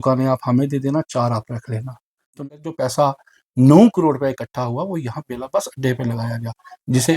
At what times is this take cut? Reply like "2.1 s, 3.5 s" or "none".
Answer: 2.4 s